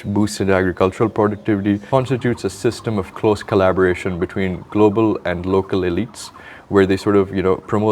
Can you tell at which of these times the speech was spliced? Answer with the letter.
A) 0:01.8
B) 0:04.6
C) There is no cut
A